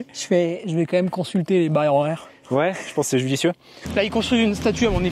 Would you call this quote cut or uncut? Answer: cut